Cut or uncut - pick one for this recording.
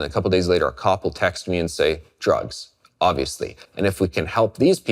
cut